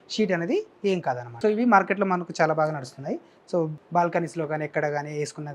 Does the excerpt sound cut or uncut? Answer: cut